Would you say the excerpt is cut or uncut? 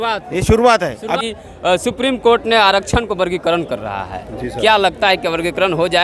cut